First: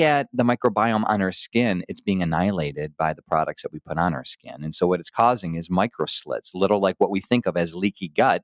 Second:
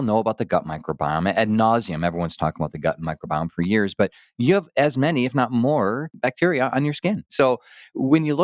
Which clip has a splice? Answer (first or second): second